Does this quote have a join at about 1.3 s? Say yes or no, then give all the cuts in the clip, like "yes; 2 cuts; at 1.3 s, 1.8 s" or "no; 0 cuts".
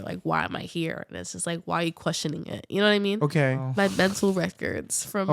no; 1 cut; at 3.6 s